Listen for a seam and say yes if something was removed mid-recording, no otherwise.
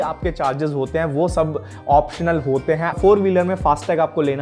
no